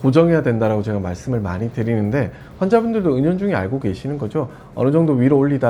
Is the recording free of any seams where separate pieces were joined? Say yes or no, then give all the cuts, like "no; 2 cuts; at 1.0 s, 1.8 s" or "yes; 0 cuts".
yes; 0 cuts